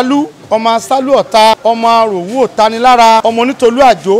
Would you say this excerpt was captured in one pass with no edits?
no; 2 cuts; at 1.6 s, 3.2 s

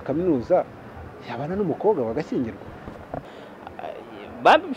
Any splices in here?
yes; 1 cut; at 3.2 s

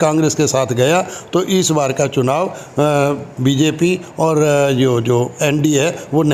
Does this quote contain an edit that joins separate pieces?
no; 0 cuts

